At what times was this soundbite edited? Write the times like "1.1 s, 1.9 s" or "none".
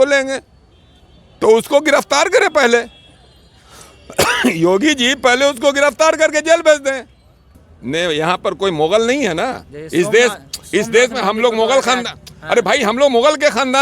7.5 s